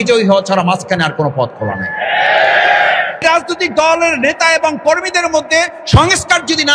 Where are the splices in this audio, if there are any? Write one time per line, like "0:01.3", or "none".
0:03.1